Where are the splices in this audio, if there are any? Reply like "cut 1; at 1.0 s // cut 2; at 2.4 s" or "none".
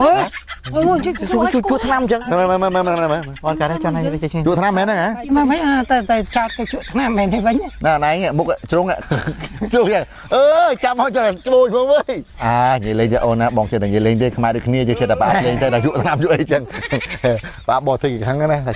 cut 1; at 5.2 s // cut 2; at 12.3 s